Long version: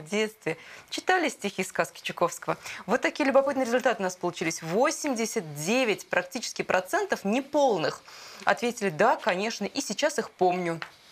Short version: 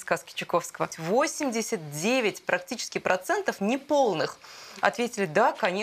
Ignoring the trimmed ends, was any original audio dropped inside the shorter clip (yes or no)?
yes